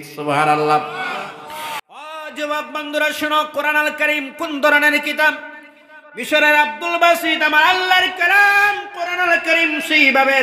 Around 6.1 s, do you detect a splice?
no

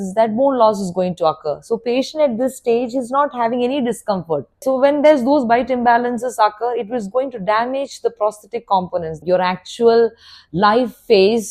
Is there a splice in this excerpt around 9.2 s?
yes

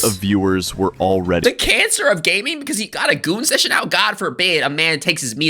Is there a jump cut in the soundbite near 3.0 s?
no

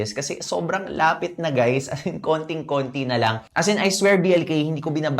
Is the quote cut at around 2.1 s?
no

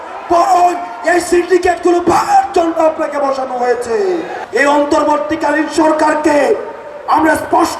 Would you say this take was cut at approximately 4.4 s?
yes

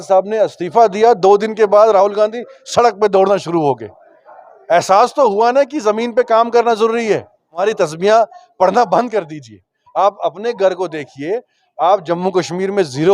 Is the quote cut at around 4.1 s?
no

